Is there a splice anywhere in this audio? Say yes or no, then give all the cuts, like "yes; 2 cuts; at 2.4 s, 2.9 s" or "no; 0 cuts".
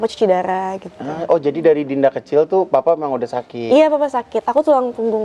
no; 0 cuts